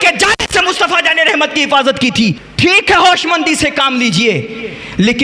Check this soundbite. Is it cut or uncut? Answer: cut